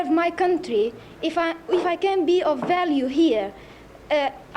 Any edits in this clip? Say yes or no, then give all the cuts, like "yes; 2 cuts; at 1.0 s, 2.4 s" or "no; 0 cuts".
no; 0 cuts